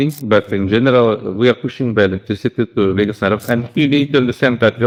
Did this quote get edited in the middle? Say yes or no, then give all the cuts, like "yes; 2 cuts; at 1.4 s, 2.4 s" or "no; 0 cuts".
no; 0 cuts